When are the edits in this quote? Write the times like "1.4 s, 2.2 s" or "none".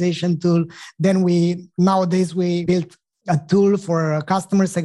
2.6 s